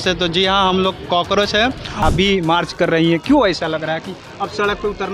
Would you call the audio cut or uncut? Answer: cut